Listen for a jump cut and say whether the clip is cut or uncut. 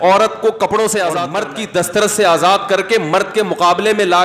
cut